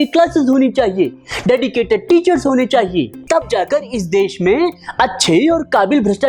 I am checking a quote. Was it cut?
yes; 1 cut; at 3.2 s

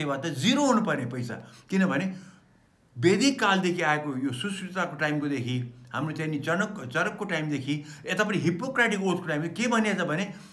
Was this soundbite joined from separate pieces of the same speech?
no; 0 cuts

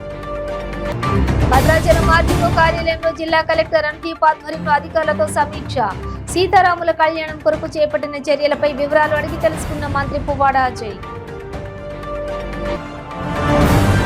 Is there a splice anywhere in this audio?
no; 0 cuts

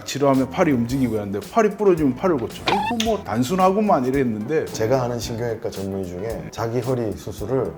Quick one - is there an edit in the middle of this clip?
yes; 2 cuts; at 2.3 s, 4.7 s

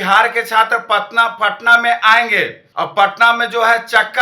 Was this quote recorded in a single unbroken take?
no; 1 cut; at 2.6 s

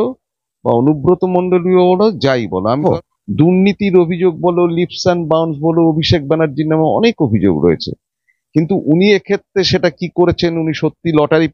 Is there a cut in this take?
yes; 1 cut; at 2.8 s

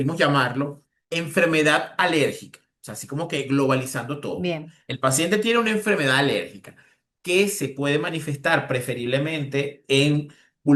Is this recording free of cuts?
yes; 0 cuts

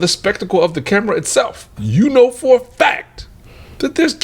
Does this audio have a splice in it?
yes; 1 cut; at 1.8 s

